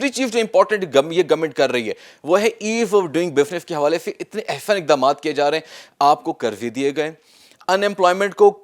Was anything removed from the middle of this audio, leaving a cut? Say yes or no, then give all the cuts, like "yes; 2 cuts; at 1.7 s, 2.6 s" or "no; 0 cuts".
no; 0 cuts